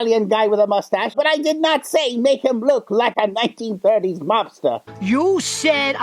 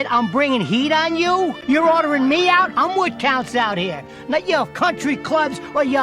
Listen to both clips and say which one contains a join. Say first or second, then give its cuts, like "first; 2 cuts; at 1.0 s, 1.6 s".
first; 2 cuts; at 1.1 s, 4.9 s